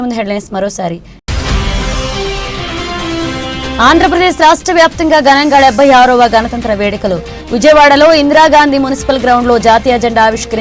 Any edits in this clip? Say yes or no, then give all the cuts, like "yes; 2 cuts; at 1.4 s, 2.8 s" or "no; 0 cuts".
yes; 2 cuts; at 1.2 s, 3.6 s